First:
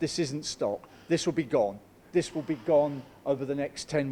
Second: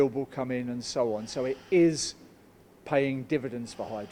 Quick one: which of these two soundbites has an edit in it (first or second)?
first